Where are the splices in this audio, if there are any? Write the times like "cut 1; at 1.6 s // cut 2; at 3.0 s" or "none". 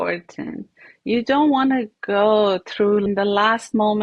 cut 1; at 3.1 s